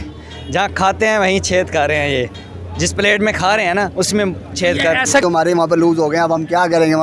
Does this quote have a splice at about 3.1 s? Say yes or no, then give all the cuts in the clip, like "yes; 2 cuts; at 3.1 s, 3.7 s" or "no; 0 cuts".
no; 1 cut; at 5.2 s